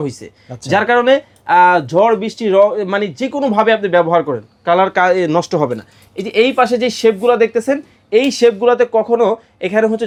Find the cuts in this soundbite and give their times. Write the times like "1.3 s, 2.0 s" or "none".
none